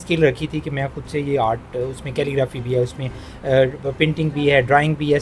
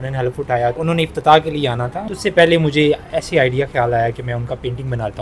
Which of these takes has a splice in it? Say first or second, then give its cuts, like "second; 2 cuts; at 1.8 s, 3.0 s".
second; 2 cuts; at 0.8 s, 2.0 s